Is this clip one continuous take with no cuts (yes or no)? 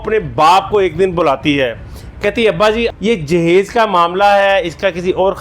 no